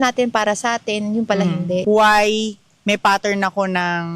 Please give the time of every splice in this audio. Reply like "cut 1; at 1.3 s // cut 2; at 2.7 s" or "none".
cut 1; at 1.8 s